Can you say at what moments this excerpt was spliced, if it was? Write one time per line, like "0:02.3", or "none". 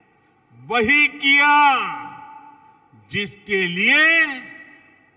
none

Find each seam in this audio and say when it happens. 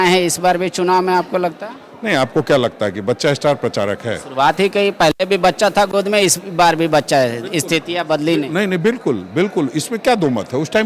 none

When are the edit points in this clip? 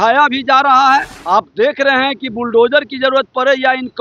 0:01.2

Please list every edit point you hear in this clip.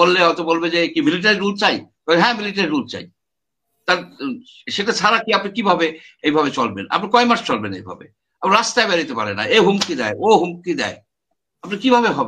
none

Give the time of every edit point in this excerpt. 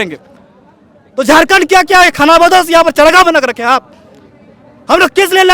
none

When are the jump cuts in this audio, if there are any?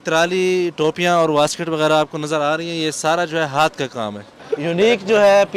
0:04.4

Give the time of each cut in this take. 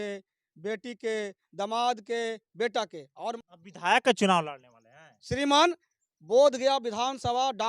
0:03.4

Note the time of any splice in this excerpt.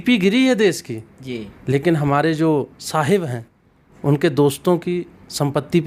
none

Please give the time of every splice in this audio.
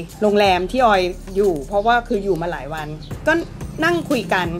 none

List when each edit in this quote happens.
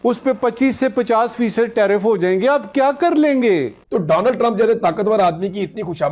0:03.8

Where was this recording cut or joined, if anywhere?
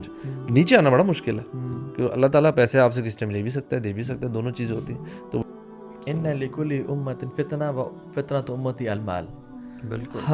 0:05.4

